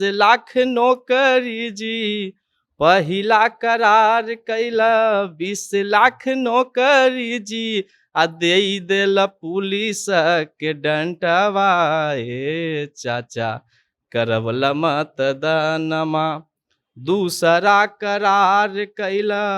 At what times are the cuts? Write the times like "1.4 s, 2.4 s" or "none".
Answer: none